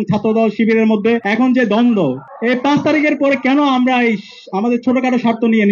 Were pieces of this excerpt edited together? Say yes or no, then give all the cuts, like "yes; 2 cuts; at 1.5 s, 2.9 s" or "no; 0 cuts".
yes; 2 cuts; at 1.3 s, 2.3 s